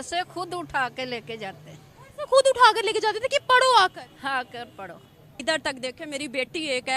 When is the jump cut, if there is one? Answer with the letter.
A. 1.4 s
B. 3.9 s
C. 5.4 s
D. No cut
C